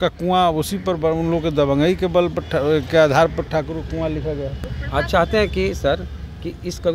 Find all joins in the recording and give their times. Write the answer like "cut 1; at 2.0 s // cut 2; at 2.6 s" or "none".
none